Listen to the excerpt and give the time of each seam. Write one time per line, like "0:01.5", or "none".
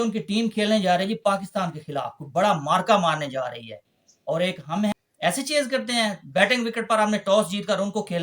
0:04.9